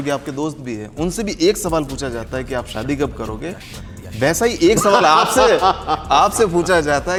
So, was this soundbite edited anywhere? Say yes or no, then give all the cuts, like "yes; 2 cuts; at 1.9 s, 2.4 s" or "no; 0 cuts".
no; 0 cuts